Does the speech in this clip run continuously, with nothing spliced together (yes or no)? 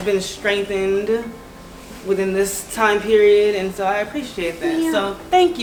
yes